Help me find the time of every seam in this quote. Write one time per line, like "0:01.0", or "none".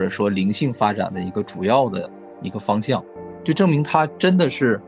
none